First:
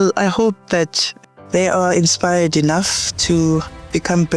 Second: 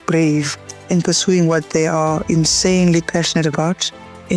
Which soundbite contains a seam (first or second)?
first